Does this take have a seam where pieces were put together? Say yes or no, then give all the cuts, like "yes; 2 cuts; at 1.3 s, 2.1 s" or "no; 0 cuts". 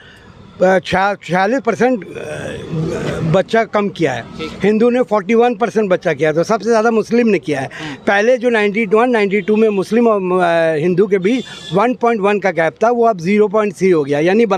no; 0 cuts